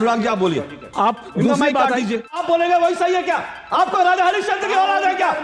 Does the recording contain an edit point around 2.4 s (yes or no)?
yes